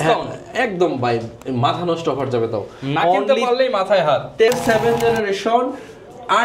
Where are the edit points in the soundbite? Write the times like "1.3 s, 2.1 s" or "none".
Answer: 4.5 s